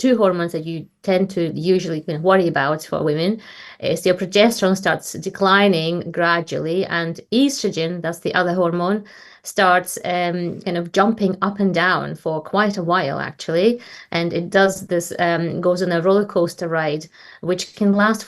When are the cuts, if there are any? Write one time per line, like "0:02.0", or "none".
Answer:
none